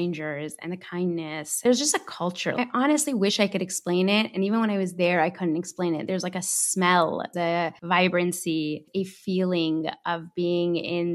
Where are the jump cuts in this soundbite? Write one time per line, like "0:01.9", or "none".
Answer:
0:01.6
0:02.5
0:07.5
0:08.8